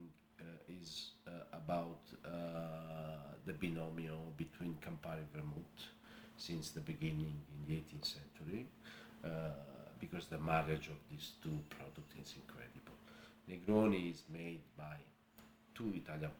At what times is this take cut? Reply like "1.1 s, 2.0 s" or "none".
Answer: none

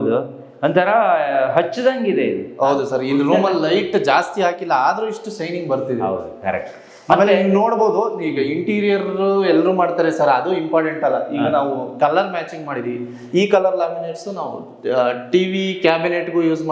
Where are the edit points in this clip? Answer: none

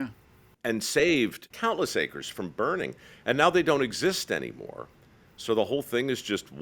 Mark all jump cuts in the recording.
1.5 s

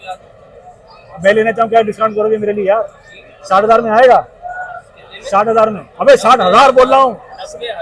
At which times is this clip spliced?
none

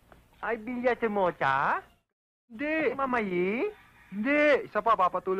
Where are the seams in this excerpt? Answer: 3.0 s

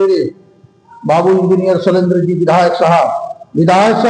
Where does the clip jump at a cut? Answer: none

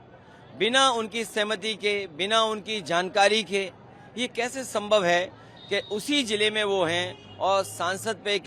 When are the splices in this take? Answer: none

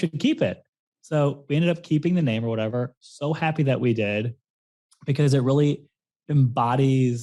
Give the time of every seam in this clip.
2.7 s

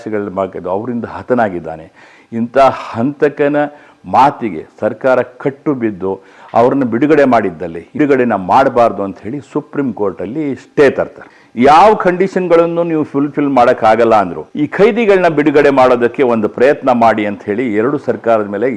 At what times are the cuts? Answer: 7.9 s, 11.4 s, 14.4 s

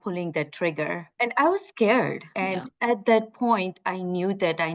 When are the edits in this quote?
1.1 s, 2.2 s

